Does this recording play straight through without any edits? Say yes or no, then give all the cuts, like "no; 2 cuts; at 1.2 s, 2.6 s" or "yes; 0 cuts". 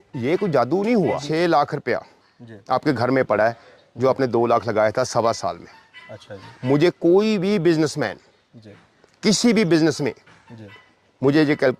no; 1 cut; at 1.2 s